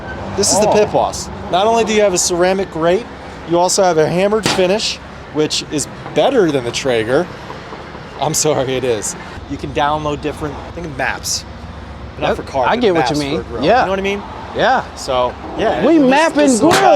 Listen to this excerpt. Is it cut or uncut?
cut